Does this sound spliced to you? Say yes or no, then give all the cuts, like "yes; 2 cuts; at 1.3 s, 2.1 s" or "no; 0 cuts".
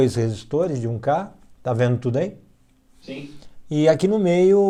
no; 0 cuts